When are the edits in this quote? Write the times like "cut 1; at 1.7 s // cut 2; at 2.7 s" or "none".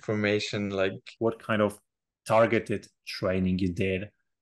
cut 1; at 1.0 s